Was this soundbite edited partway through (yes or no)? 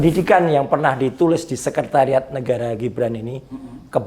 no